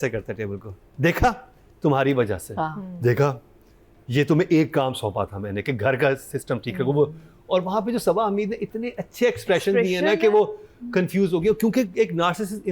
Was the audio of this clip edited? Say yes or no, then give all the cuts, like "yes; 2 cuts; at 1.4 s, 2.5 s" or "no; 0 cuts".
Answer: no; 0 cuts